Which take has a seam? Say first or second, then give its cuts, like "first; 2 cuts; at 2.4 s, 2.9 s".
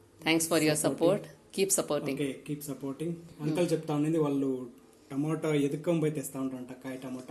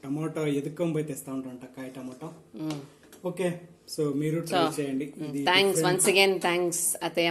first; 1 cut; at 3.3 s